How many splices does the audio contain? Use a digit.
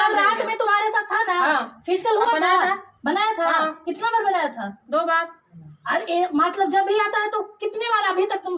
0